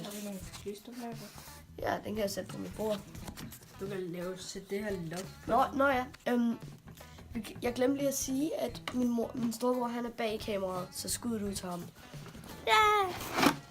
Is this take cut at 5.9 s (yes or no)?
no